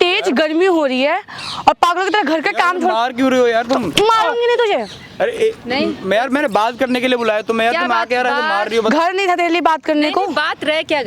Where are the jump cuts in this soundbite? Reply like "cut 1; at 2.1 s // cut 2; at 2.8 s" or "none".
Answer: none